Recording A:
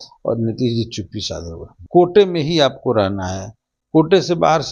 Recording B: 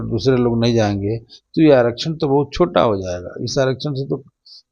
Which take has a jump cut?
A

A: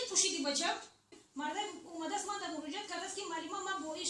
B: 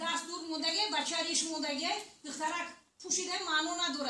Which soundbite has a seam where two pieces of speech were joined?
A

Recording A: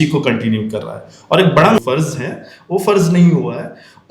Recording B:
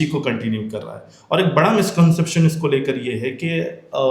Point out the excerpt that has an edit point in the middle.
A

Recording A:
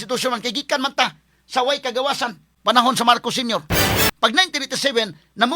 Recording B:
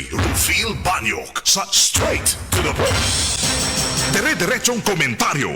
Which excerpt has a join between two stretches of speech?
A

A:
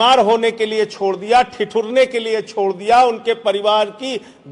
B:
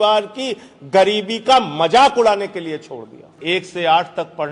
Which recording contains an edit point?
B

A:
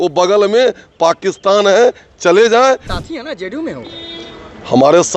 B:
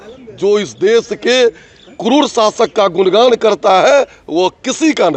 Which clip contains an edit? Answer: A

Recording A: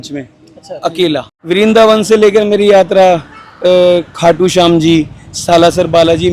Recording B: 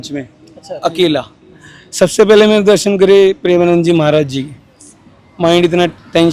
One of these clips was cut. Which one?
A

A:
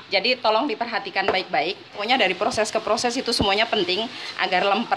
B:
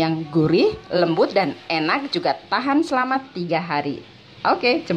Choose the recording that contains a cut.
A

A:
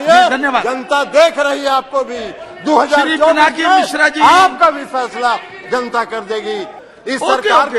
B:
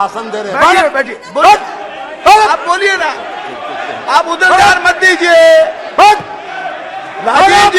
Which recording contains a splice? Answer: A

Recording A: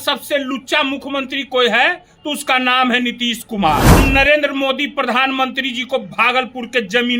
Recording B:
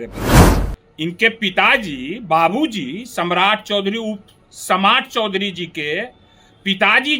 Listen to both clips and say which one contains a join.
A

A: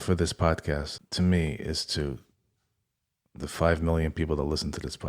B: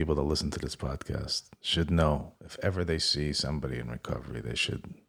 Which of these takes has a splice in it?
A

